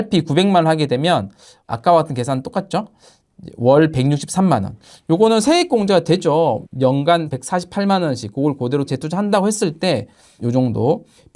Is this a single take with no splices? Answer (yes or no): yes